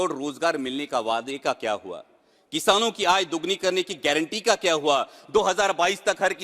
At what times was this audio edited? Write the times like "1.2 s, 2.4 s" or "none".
none